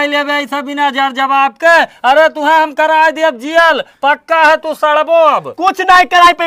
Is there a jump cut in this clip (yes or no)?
no